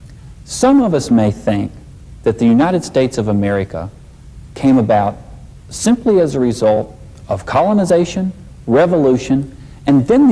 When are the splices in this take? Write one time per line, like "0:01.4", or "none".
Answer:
none